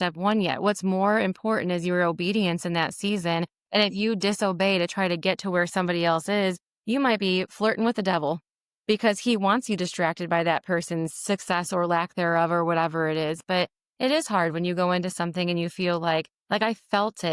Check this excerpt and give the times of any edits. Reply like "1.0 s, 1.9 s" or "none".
none

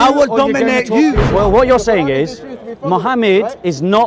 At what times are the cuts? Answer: 1.2 s

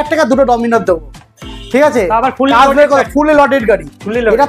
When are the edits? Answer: none

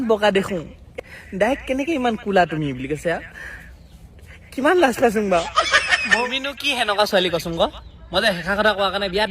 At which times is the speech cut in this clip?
0.9 s, 6.2 s

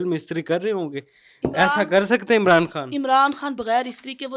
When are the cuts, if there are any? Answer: none

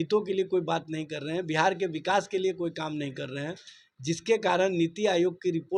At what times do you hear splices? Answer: none

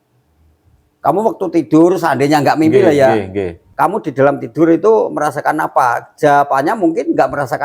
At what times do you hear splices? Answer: 3.6 s

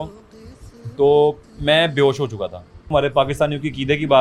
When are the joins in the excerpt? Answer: 2.9 s

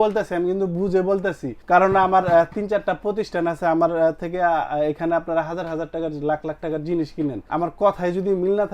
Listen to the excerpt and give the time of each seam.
1.5 s, 7.4 s

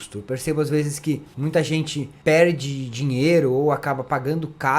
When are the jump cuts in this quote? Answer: 1.3 s, 2.0 s

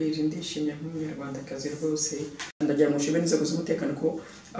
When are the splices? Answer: 2.6 s

